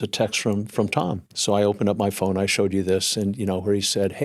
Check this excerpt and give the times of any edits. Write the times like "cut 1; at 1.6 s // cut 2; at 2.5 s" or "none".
cut 1; at 1.3 s